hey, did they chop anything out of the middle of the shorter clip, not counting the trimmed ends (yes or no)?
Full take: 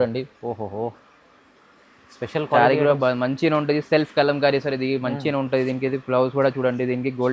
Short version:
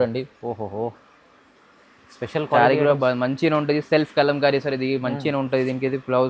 no